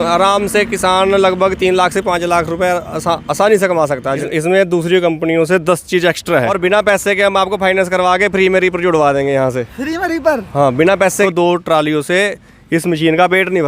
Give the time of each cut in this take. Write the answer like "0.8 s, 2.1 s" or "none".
4.3 s, 6.5 s, 11.3 s